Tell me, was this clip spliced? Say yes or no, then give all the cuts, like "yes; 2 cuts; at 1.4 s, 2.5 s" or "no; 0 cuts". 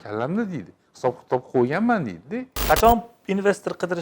yes; 1 cut; at 2.5 s